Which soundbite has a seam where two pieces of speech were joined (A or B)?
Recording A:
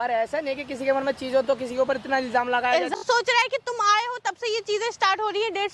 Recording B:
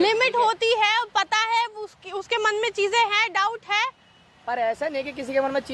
A